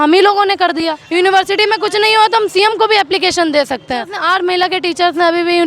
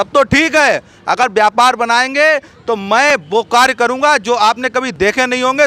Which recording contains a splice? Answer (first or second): first